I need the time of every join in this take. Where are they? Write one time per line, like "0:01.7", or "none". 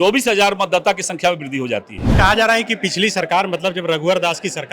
0:02.0